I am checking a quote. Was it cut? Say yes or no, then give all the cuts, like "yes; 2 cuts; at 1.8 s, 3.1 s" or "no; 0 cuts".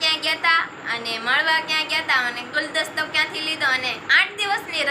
no; 0 cuts